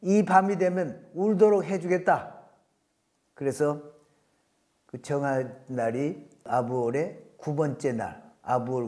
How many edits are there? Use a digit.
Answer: 0